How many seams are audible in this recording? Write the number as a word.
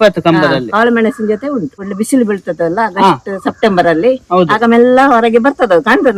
one